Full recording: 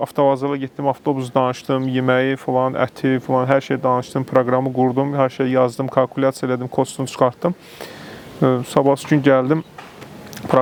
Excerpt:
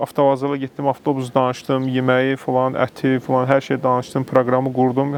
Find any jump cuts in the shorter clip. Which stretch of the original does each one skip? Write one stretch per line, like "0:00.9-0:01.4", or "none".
none